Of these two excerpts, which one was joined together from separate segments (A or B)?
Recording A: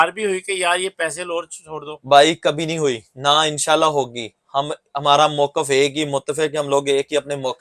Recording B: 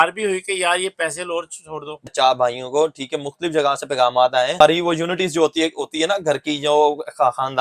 B